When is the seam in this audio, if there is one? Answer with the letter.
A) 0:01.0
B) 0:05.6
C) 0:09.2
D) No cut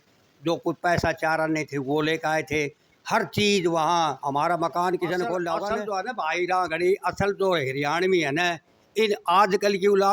B